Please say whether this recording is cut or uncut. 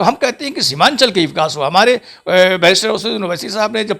uncut